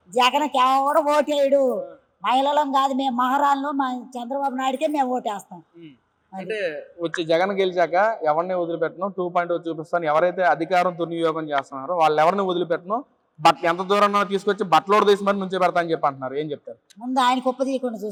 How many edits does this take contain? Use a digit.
0